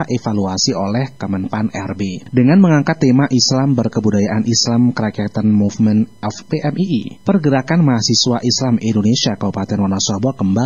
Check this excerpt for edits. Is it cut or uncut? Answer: uncut